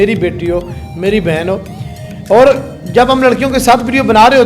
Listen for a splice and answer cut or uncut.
uncut